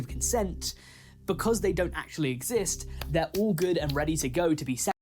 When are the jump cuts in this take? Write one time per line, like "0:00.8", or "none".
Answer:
none